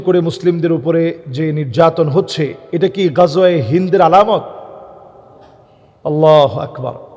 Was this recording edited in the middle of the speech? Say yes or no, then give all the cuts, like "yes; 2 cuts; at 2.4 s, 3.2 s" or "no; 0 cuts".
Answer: no; 0 cuts